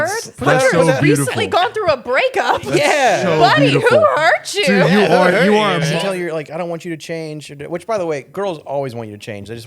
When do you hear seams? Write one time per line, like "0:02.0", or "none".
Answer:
0:05.9